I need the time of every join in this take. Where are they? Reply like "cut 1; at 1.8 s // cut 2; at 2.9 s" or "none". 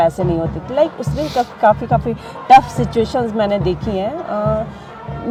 none